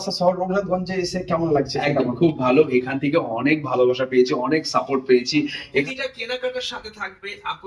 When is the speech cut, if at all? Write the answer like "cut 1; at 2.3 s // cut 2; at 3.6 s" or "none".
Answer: cut 1; at 5.9 s